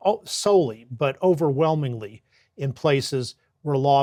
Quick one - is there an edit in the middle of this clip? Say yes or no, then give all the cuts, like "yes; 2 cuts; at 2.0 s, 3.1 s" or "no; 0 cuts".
no; 0 cuts